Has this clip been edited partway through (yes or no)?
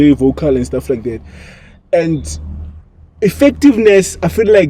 no